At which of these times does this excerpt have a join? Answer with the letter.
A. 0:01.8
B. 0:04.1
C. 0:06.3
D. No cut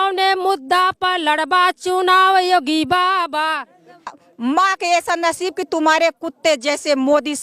B